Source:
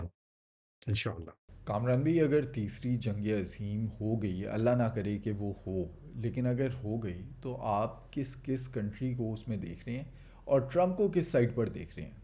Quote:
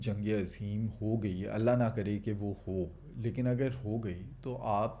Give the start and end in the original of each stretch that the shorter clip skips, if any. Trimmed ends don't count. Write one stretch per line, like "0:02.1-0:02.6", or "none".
none

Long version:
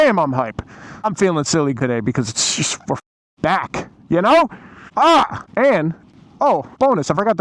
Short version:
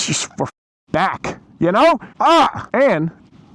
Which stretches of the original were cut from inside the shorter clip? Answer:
0:04.9-0:05.3

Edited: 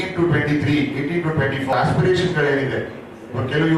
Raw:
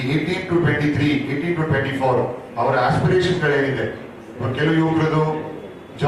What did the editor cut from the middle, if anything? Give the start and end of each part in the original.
0:02.1-0:02.8

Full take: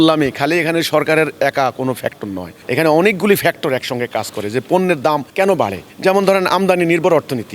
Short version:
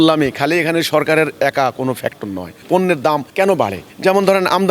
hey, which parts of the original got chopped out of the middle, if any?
0:02.6-0:04.6

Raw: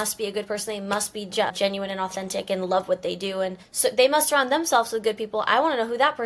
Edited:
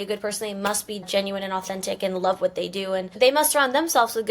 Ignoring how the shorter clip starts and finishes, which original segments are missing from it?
0:01.3-0:01.5
0:03.6-0:03.9

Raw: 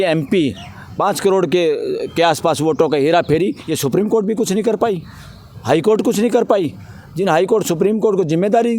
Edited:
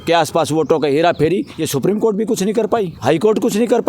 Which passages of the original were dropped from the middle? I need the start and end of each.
0:05.0-0:05.6

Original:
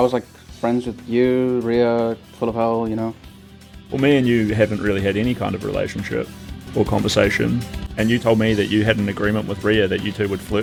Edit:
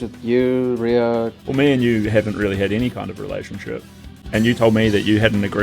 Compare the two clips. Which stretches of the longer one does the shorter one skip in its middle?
0:02.2-0:03.8
0:06.6-0:07.8

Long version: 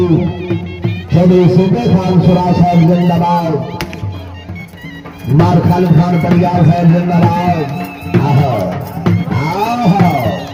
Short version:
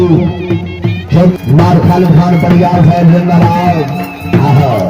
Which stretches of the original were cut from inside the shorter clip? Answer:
0:01.3-0:05.1

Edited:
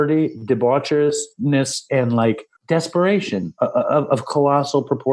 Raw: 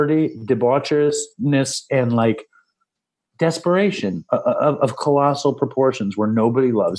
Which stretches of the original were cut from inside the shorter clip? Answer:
0:02.5-0:03.2

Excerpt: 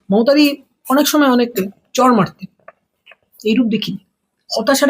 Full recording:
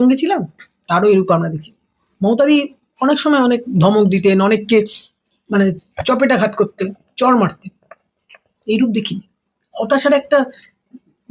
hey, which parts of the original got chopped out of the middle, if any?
0:03.7-0:06.8

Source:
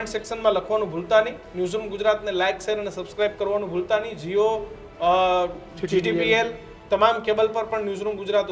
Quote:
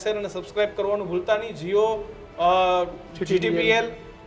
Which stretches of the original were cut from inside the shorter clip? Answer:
none

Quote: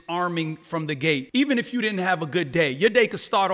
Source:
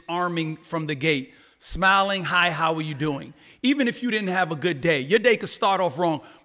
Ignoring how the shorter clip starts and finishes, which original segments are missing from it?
0:01.3-0:03.5

